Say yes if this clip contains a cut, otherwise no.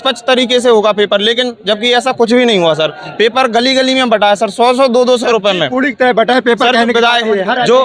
no